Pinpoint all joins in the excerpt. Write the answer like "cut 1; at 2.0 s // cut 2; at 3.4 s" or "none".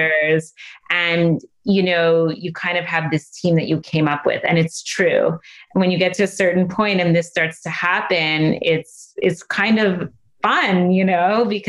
none